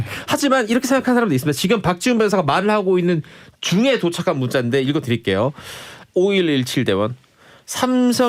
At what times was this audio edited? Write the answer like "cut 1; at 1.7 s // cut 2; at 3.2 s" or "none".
none